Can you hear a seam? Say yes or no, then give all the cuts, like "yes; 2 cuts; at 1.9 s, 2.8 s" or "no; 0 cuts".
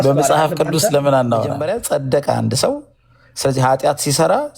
yes; 1 cut; at 1.7 s